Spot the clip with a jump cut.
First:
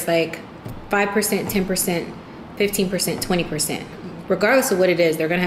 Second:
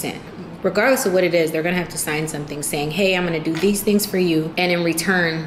second; 2 cuts; at 3.5 s, 4.5 s

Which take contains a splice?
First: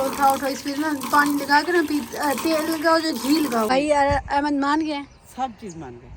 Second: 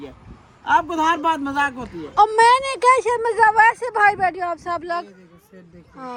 first; 1 cut; at 3.7 s

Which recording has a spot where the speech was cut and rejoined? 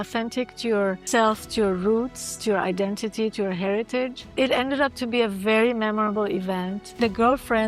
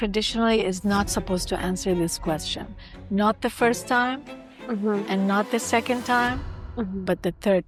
first; 3 cuts; at 1.0 s, 4.2 s, 7.0 s

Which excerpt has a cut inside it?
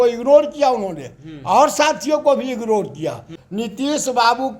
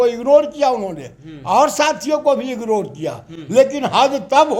first; 1 cut; at 3.4 s

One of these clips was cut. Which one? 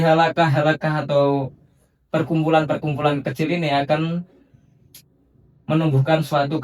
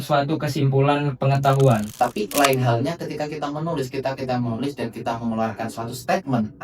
second; 1 cut; at 1.9 s

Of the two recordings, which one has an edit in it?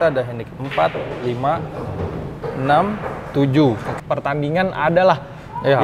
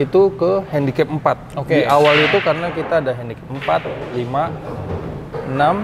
first; 1 cut; at 3.9 s

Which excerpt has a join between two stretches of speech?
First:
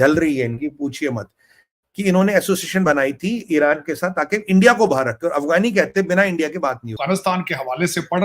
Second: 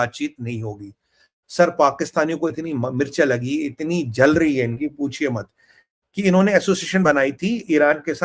first; 1 cut; at 6.9 s

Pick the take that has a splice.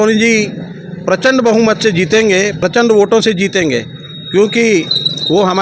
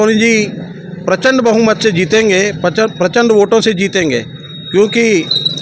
first; 1 cut; at 2.6 s

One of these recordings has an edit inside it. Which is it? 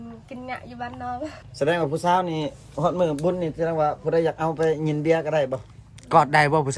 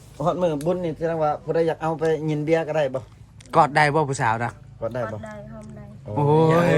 first; 1 cut; at 1.4 s

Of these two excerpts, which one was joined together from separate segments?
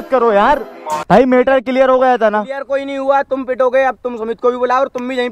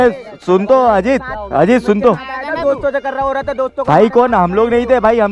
first; 1 cut; at 1.0 s

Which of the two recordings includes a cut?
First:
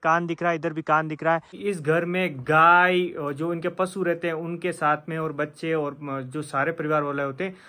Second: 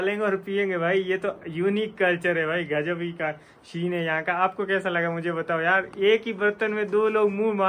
first; 1 cut; at 1.5 s

